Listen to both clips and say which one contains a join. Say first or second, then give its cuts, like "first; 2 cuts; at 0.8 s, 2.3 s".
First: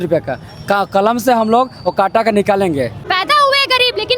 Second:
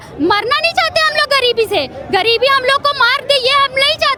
first; 1 cut; at 3.0 s